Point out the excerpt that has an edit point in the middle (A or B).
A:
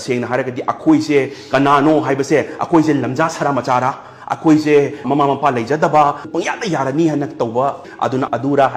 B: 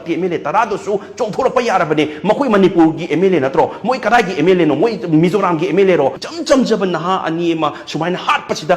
B